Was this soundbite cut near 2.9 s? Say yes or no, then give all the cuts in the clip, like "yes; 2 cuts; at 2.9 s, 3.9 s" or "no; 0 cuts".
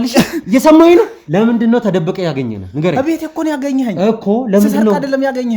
no; 1 cut; at 1.2 s